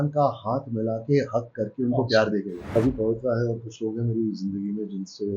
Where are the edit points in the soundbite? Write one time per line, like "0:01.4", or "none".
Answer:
0:02.7